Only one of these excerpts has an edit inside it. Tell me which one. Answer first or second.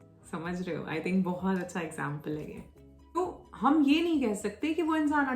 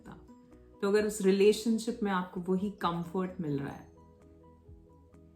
first